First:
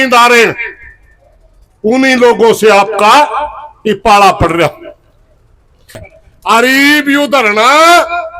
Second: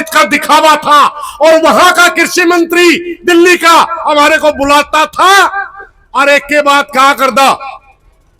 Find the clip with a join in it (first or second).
first